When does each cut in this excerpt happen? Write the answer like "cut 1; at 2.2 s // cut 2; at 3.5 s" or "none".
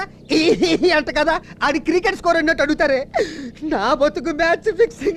none